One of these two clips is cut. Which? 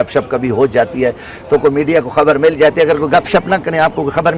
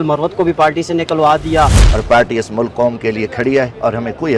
second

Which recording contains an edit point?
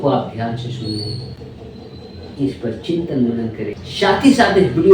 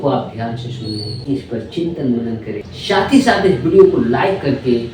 second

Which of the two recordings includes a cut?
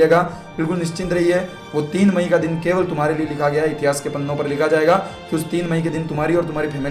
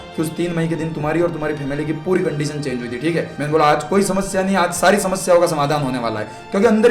second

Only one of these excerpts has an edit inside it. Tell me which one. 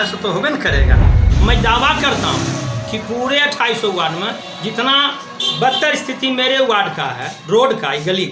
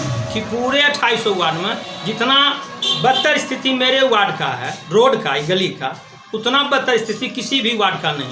first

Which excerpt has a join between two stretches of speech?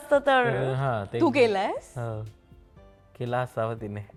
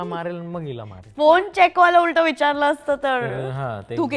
second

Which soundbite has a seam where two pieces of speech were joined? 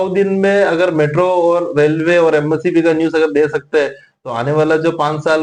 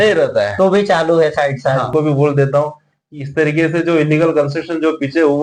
second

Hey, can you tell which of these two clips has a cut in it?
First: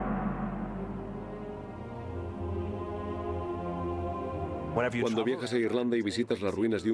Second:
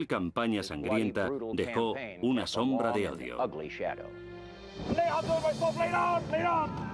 first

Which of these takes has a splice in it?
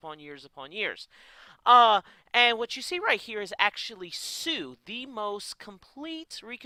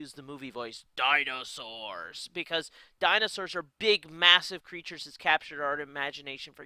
second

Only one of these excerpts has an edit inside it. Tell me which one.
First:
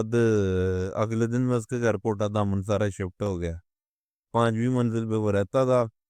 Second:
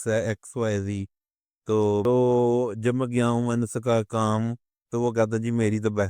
second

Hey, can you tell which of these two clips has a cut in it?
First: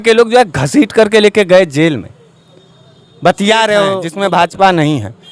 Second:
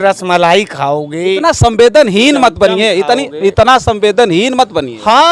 first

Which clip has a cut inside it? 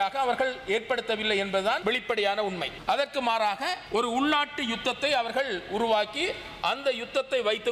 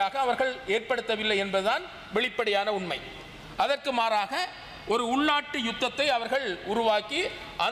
first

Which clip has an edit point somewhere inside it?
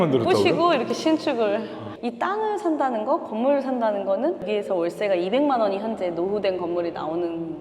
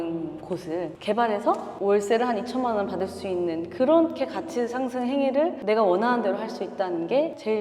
first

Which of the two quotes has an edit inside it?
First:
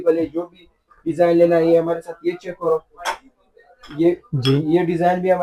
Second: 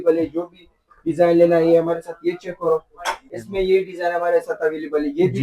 second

